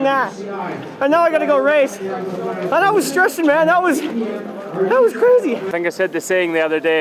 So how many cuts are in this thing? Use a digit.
1